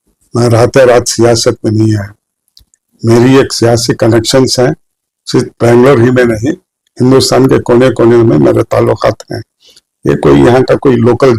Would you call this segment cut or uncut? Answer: uncut